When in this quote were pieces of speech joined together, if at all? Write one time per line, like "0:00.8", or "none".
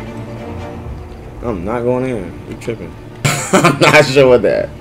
0:03.2